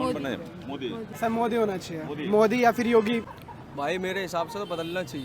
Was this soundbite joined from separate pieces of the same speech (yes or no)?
yes